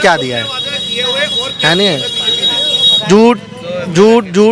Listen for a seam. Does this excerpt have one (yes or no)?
no